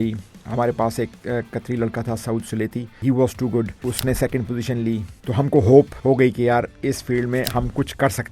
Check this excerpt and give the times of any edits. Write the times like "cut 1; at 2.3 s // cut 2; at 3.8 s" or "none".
cut 1; at 3.0 s // cut 2; at 3.7 s // cut 3; at 5.2 s // cut 4; at 6.3 s